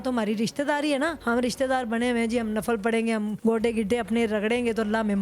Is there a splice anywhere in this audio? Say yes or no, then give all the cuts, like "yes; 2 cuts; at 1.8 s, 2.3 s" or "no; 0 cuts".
yes; 2 cuts; at 1.2 s, 3.3 s